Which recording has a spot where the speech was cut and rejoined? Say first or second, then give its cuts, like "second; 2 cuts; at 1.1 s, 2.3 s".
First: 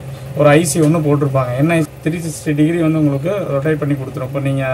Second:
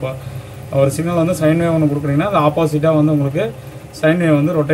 first; 1 cut; at 1.9 s